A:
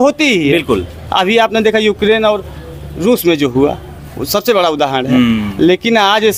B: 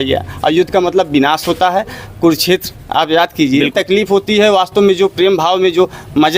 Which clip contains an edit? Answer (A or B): B